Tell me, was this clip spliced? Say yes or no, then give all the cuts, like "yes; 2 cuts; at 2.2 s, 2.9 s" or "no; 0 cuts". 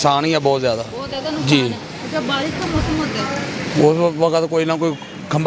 no; 0 cuts